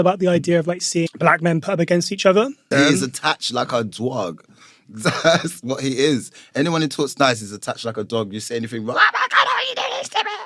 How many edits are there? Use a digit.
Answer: 2